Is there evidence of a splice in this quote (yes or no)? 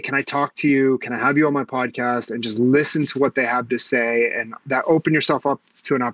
no